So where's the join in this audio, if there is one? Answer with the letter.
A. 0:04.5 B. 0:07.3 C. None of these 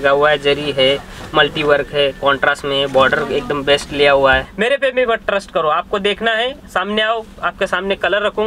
A